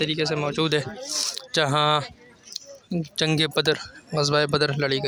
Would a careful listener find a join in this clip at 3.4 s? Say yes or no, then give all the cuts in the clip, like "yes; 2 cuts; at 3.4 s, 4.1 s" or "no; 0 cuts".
no; 0 cuts